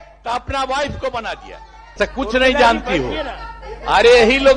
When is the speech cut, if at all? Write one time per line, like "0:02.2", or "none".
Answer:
0:02.0